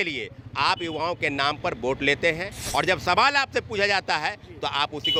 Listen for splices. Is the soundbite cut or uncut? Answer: uncut